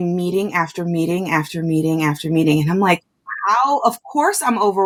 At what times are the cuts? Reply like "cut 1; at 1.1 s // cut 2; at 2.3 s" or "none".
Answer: none